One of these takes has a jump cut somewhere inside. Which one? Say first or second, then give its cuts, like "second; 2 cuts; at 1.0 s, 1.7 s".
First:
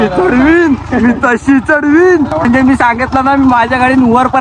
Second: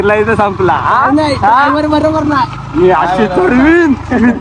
first; 1 cut; at 2.5 s